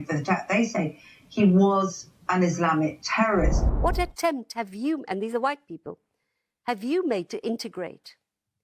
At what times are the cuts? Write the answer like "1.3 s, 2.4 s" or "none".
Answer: 3.7 s